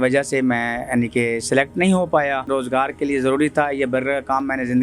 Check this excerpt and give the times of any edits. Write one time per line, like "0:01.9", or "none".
0:02.5